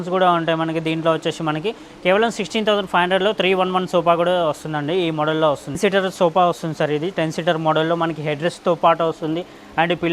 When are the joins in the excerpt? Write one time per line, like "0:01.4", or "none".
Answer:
0:05.8